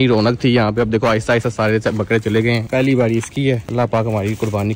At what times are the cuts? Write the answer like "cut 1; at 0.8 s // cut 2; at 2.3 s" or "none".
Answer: cut 1; at 2.7 s